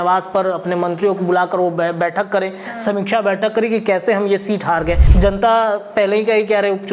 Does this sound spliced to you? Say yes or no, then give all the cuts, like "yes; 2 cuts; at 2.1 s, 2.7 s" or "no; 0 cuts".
yes; 1 cut; at 5.1 s